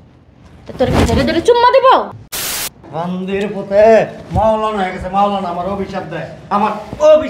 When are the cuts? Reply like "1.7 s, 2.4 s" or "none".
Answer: 2.2 s